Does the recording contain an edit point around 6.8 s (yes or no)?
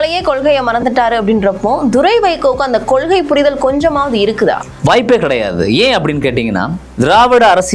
yes